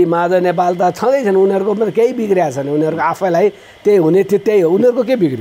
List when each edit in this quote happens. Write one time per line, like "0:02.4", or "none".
none